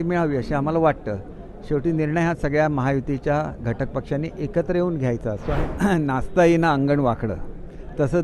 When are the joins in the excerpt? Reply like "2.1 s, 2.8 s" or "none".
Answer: 5.7 s